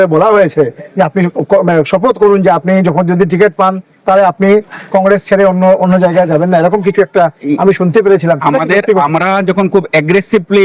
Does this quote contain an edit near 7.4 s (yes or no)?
no